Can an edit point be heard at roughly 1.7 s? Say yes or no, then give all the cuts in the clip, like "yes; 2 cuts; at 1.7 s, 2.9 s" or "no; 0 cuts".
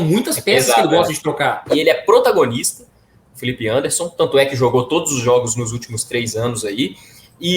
yes; 1 cut; at 1.7 s